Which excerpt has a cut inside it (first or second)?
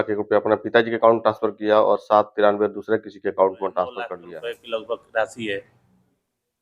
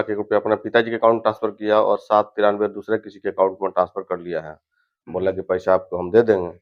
first